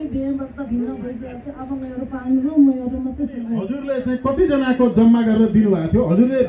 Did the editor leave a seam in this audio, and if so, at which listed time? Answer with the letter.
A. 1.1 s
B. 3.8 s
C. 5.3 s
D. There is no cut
B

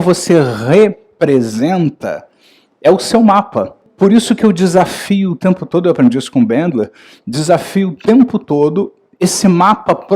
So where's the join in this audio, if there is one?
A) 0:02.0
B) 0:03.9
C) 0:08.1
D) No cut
B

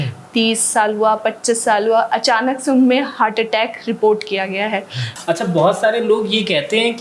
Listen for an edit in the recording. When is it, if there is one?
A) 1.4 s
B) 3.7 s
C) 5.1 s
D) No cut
C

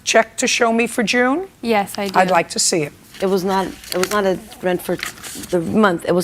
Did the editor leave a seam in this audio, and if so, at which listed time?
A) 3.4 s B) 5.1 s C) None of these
A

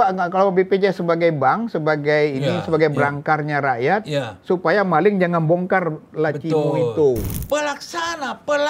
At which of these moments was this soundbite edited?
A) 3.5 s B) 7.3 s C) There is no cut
B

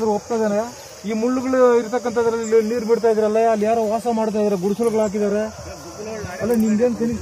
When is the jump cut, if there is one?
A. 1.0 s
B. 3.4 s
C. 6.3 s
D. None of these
A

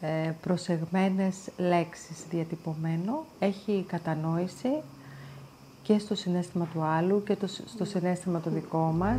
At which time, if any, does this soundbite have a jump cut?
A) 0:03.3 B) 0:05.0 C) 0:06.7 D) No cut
D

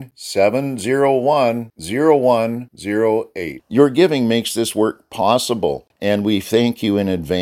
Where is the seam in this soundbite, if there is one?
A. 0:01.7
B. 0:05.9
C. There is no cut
B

